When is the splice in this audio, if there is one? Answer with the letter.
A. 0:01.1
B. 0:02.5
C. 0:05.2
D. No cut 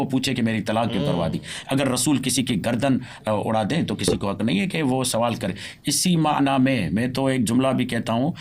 D